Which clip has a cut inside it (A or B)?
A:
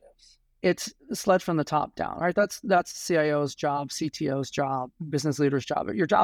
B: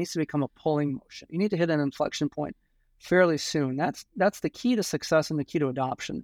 A